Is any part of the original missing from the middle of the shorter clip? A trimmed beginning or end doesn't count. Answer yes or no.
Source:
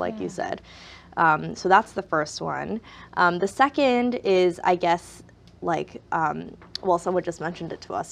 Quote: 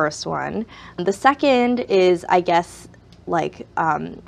yes